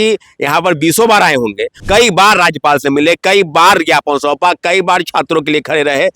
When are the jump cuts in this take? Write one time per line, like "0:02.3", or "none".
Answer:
0:01.8

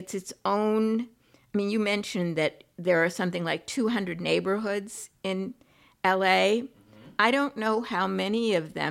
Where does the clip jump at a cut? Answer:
none

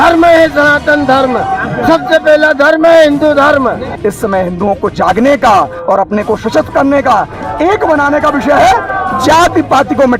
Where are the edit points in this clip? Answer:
0:03.9

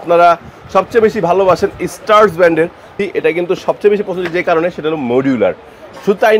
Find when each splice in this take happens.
0:03.0

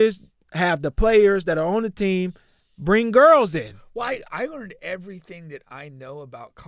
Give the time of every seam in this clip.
none

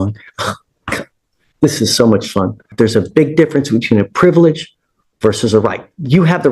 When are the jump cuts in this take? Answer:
0:02.7

